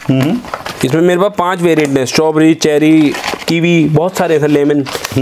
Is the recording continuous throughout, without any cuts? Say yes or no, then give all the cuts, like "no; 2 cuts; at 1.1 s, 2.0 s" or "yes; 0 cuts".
yes; 0 cuts